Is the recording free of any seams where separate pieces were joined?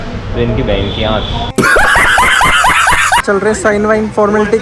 no; 1 cut; at 3.2 s

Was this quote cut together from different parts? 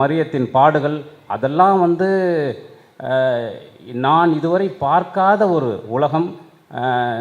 no; 0 cuts

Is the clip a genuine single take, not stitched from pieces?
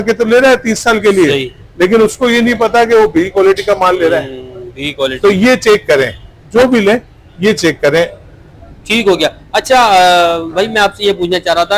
yes; 0 cuts

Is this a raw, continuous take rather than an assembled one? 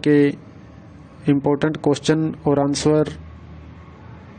no; 1 cut; at 2.3 s

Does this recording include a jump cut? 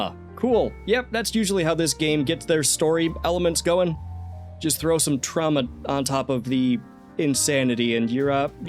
no; 0 cuts

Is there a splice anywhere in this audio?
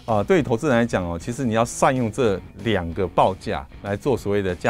yes; 1 cut; at 3.7 s

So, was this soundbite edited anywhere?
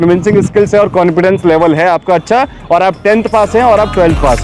no; 0 cuts

